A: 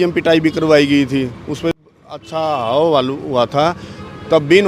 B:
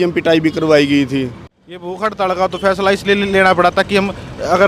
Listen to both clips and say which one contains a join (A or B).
B